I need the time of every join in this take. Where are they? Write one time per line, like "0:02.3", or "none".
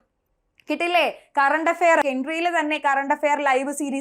0:02.0